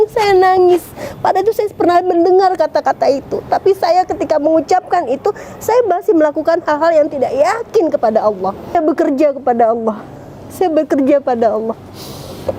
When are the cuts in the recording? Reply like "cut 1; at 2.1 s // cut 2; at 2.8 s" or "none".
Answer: cut 1; at 8.7 s